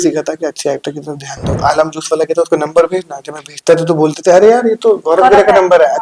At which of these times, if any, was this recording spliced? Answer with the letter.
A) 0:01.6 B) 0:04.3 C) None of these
A